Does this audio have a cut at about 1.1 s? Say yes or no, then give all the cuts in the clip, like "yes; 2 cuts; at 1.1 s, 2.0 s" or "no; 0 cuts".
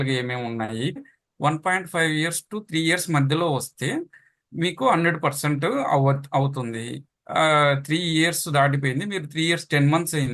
yes; 1 cut; at 1.1 s